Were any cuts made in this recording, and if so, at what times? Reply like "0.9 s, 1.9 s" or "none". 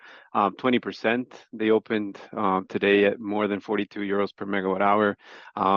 none